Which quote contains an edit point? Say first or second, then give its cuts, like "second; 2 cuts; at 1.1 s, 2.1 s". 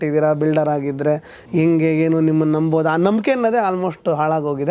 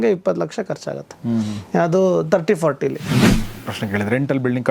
second; 1 cut; at 3.5 s